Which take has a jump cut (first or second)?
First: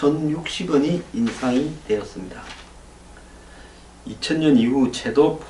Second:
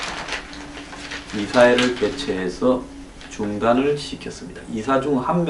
second